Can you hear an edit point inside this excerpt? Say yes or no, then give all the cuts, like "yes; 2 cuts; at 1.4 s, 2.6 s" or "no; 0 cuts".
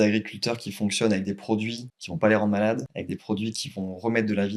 no; 0 cuts